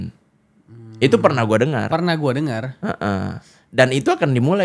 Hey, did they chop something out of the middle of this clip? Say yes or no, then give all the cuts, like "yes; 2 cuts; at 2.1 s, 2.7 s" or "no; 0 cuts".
no; 0 cuts